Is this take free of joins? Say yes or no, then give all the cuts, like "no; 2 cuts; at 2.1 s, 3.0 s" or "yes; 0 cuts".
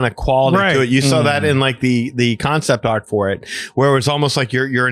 yes; 0 cuts